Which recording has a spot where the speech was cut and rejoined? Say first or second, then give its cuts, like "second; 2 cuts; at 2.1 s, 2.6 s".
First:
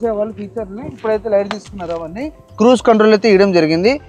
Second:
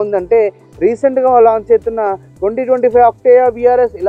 first; 1 cut; at 2.5 s